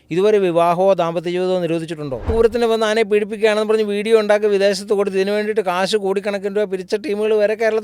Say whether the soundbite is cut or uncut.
cut